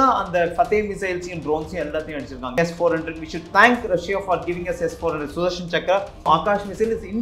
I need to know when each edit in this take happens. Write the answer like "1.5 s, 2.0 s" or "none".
2.5 s, 6.2 s